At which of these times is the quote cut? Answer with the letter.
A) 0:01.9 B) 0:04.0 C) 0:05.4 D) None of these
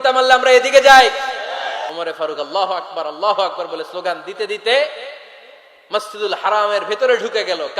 A